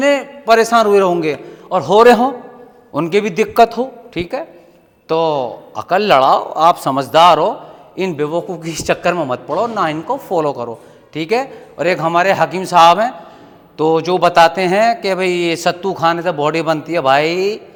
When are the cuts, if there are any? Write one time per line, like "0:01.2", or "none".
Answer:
none

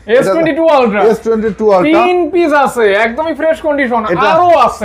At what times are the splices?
none

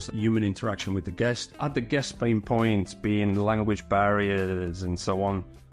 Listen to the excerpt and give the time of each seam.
0:01.5

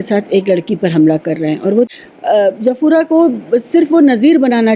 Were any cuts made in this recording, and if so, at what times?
0:02.0

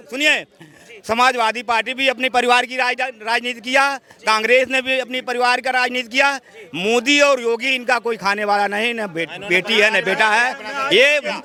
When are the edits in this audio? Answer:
none

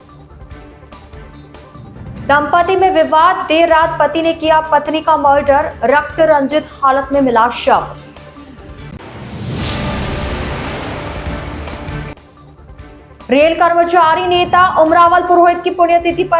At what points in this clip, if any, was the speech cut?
0:01.5

